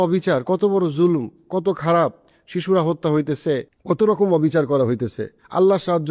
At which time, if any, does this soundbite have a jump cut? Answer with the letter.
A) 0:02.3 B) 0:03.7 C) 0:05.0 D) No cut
B